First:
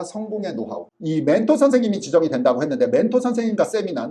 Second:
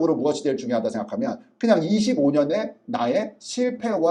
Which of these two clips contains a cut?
first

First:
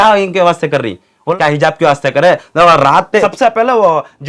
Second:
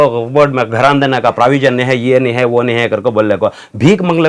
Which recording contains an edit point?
first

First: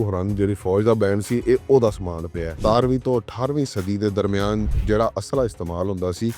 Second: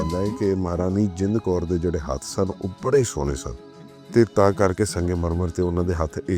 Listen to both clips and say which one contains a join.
first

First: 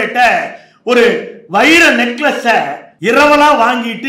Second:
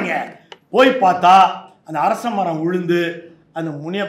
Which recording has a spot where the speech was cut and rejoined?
first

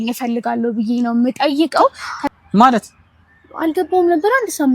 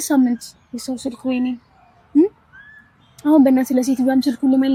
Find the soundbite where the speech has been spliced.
first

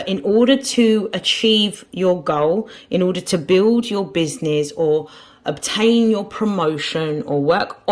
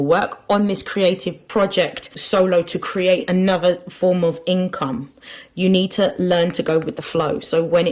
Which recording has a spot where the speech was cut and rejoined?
second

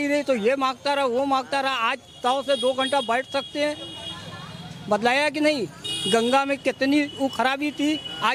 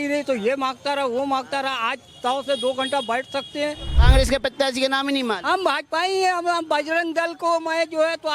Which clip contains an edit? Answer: second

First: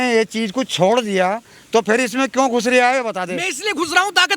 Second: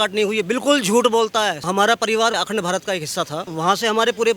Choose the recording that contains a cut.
second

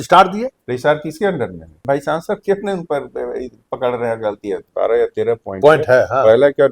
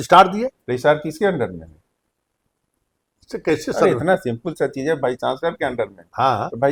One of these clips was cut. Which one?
first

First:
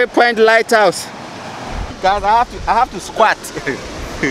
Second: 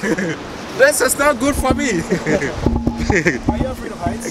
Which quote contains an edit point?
first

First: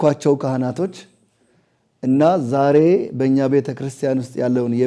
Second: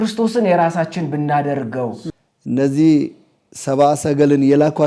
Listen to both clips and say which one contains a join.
second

